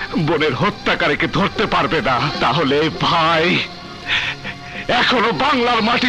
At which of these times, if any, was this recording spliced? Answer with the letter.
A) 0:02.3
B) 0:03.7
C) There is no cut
A